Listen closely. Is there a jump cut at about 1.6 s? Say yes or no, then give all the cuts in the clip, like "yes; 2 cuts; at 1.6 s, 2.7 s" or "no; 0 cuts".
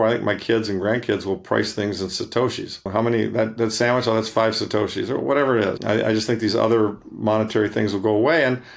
no; 2 cuts; at 2.9 s, 5.8 s